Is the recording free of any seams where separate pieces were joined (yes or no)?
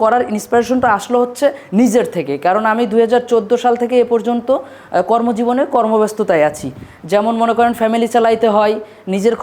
yes